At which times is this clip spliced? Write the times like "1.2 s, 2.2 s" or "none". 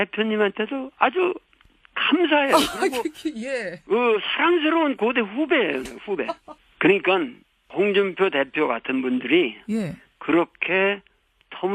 6.6 s